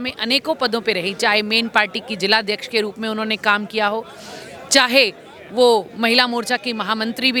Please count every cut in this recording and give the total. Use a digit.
0